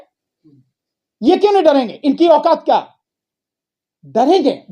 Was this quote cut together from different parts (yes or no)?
no